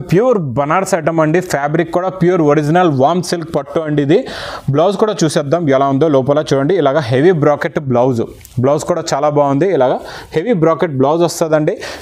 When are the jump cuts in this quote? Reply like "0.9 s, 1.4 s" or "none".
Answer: none